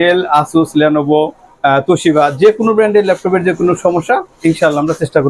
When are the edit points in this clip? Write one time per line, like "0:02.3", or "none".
none